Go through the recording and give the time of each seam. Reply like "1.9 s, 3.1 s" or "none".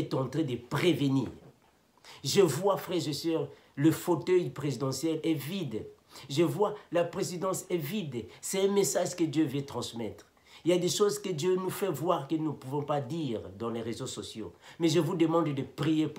none